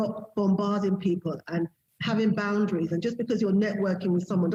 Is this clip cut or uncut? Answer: uncut